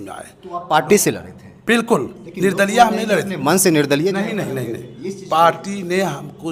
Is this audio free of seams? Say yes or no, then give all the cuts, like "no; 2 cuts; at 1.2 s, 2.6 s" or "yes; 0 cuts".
yes; 0 cuts